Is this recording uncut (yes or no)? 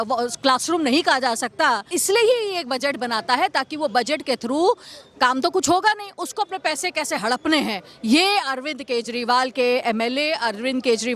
no